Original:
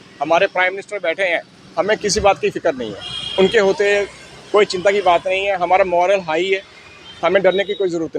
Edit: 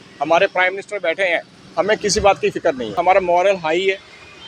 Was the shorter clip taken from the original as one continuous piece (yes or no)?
no